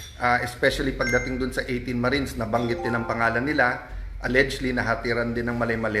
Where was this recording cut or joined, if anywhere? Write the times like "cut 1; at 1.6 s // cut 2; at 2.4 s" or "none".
none